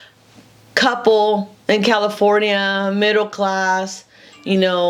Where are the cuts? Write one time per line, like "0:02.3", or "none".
none